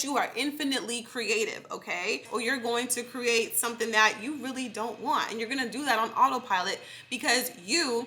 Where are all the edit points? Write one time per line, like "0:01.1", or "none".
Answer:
0:02.3